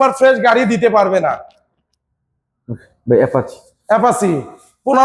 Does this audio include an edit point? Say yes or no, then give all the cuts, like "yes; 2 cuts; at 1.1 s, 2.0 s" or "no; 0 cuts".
no; 0 cuts